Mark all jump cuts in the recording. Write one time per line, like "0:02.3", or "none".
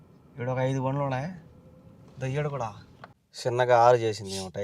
0:03.4